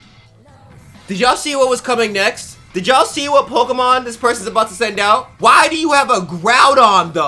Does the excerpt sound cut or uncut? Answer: cut